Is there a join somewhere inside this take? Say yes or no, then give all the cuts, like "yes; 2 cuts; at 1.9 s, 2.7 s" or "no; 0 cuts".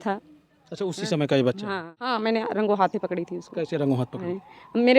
yes; 1 cut; at 1.9 s